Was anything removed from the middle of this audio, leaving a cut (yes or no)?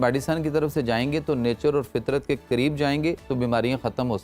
no